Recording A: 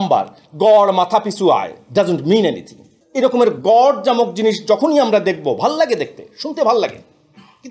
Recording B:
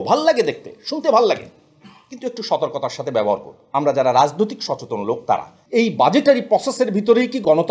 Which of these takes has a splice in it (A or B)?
B